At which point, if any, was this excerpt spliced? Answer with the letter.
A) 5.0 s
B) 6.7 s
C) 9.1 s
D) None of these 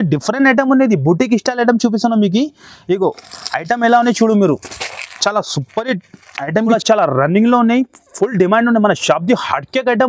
B